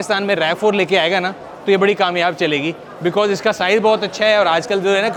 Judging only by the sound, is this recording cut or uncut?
uncut